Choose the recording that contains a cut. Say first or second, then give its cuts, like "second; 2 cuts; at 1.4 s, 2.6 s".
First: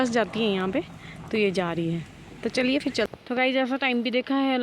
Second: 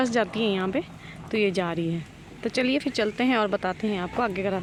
first; 1 cut; at 3.1 s